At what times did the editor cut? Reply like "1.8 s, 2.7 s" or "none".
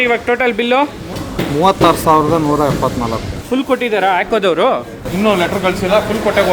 1.1 s, 3.4 s